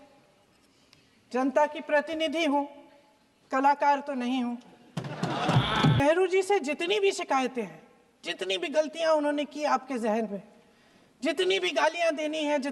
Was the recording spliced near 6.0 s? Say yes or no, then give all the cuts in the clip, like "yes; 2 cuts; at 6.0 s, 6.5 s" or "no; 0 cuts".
yes; 1 cut; at 6.0 s